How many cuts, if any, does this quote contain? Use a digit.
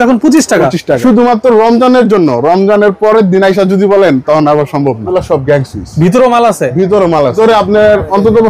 3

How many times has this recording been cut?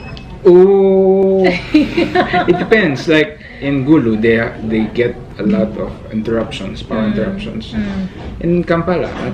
0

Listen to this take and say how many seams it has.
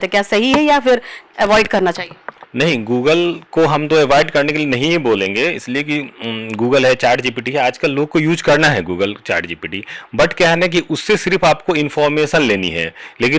0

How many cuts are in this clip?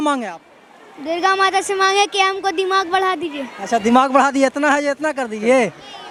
0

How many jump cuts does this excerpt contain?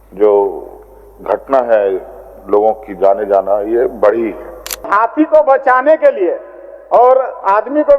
1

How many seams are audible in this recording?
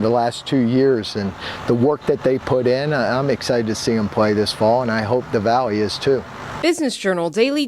1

